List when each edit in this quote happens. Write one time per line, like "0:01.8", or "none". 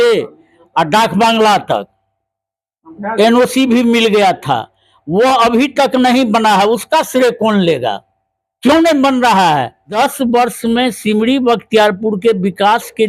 0:09.9